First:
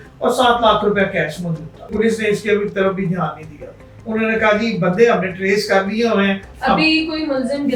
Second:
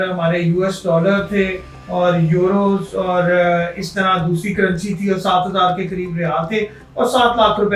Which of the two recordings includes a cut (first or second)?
first